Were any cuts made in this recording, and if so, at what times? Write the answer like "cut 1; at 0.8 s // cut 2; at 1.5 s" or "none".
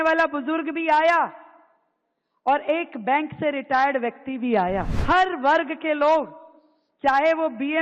cut 1; at 4.9 s